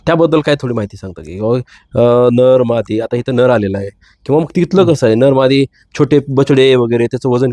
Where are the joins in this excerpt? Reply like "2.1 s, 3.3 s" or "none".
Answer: none

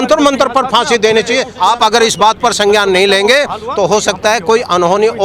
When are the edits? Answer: 1.5 s

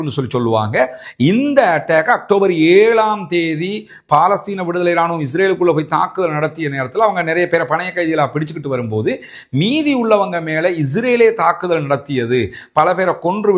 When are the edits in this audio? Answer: none

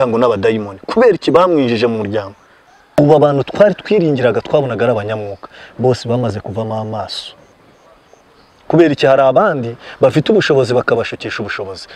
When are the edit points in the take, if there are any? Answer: 2.8 s

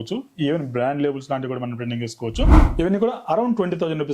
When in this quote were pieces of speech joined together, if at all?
2.6 s

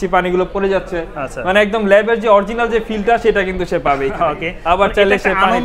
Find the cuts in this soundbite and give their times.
none

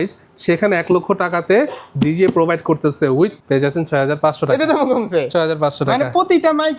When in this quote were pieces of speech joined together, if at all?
3.4 s

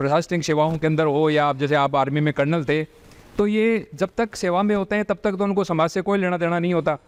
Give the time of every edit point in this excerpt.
none

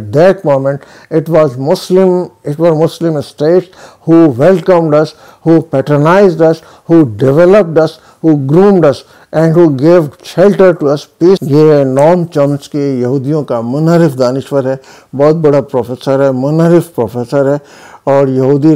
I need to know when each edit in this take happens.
11.4 s

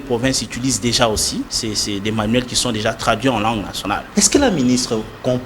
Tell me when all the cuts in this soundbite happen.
1.5 s, 4.0 s

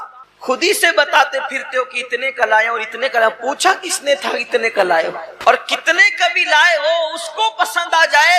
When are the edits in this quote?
5.3 s

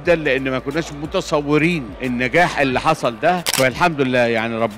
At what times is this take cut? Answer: 1.9 s, 3.5 s

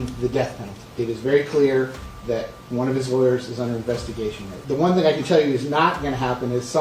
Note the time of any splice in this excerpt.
4.5 s

